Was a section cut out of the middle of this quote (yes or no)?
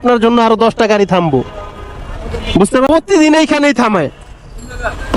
yes